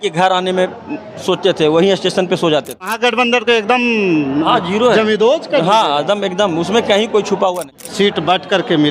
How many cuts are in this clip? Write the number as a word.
two